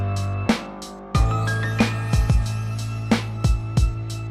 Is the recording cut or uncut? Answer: cut